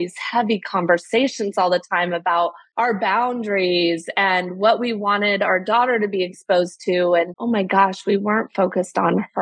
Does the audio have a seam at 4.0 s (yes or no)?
no